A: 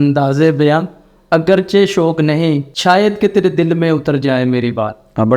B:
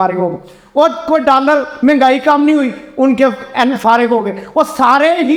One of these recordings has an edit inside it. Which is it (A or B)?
A